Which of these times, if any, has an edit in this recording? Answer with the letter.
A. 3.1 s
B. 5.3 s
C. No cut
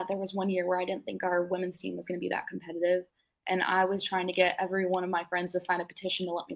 C